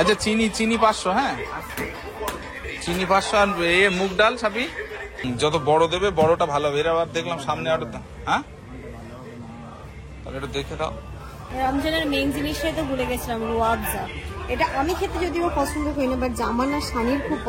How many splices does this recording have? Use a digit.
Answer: 3